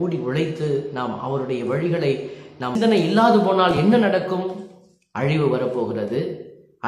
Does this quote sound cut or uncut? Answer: cut